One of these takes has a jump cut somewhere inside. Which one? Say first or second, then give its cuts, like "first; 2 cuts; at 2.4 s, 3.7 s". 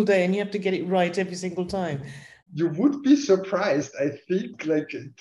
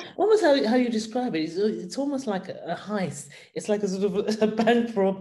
first; 1 cut; at 2.3 s